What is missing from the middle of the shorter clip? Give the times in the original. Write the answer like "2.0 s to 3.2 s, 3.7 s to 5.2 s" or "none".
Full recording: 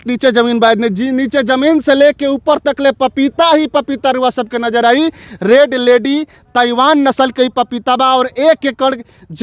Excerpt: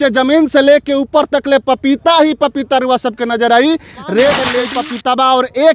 6.0 s to 7.4 s